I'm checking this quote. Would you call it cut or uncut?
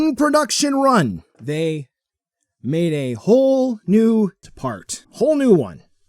cut